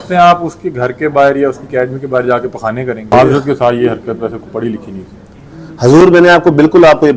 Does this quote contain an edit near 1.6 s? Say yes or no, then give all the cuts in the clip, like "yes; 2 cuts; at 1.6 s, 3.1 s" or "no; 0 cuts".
no; 1 cut; at 3.1 s